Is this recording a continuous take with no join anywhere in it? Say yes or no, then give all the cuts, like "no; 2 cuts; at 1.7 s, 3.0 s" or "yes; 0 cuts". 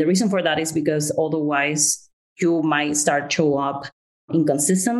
yes; 0 cuts